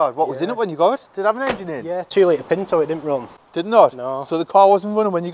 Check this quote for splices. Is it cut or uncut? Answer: uncut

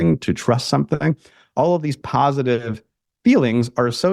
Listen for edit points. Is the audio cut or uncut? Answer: uncut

